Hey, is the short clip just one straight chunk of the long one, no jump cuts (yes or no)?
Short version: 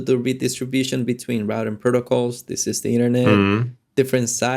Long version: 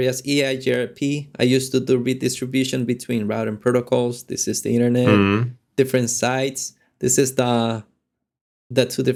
yes